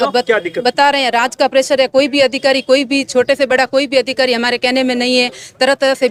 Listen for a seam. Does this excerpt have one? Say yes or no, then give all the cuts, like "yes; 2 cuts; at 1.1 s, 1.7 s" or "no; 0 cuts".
no; 0 cuts